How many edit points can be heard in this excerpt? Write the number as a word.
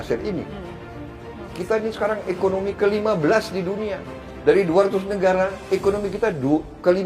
one